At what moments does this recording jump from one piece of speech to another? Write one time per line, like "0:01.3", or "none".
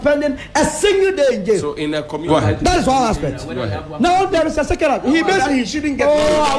0:02.3